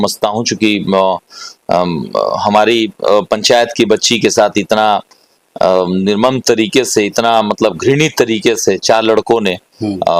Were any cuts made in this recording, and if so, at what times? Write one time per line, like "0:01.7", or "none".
none